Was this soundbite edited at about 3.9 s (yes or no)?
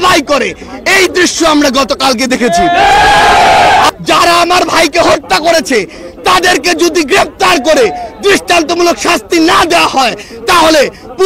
yes